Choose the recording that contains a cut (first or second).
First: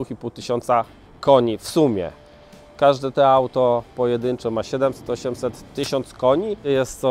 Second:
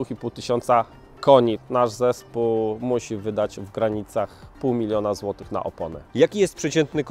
second